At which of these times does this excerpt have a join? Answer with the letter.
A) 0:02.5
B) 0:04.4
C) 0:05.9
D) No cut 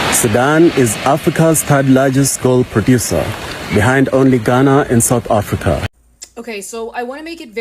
C